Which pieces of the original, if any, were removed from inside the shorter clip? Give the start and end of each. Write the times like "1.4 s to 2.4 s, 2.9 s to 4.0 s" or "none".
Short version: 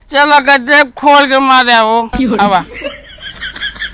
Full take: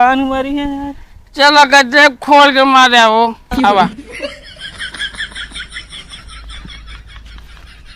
3.8 s to 4.0 s